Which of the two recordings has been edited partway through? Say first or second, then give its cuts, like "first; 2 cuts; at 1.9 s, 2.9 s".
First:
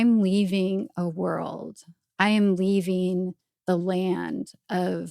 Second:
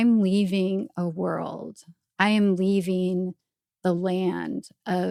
first; 1 cut; at 3.5 s